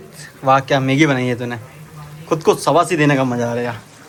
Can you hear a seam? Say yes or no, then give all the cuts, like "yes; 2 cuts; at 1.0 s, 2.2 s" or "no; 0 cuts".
no; 0 cuts